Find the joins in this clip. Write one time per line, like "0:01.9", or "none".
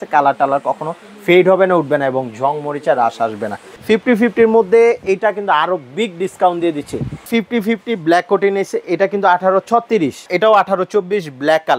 0:03.7
0:07.3
0:10.2